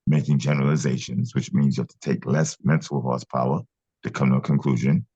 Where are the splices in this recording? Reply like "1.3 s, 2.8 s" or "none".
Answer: none